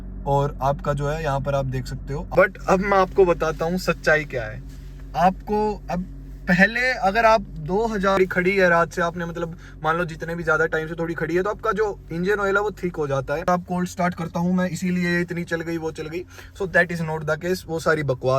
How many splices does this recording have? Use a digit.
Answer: 3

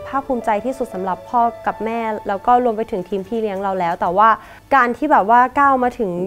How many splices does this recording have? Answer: 2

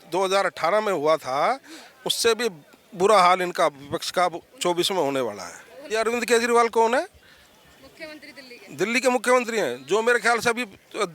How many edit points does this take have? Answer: 1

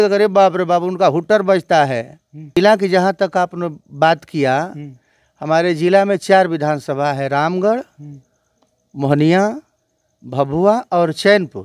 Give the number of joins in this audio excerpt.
1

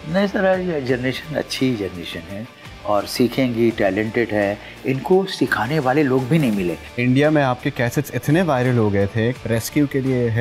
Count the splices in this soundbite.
2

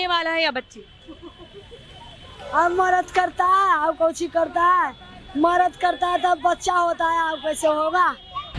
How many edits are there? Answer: 0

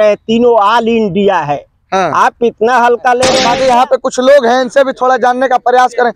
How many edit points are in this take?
1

